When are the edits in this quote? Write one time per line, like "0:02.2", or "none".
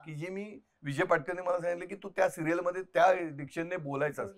none